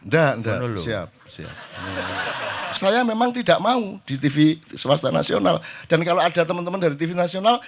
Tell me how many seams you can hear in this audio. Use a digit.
1